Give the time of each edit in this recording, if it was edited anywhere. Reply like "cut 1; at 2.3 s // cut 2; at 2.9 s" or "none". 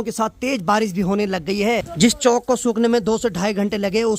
cut 1; at 1.9 s